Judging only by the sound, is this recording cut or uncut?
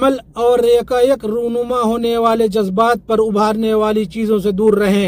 uncut